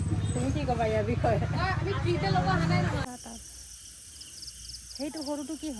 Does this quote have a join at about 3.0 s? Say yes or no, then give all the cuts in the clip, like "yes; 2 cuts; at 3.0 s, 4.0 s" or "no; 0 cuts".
yes; 1 cut; at 3.0 s